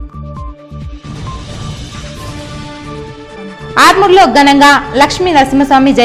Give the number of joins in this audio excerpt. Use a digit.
1